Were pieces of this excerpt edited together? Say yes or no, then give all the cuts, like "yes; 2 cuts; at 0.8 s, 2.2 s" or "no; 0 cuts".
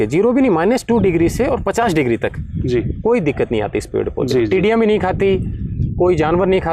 no; 0 cuts